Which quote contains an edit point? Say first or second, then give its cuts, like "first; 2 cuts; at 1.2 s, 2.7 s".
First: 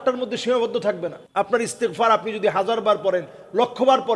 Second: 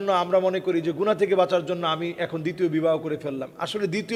first; 1 cut; at 1.2 s